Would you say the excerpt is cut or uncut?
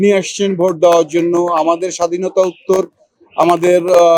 uncut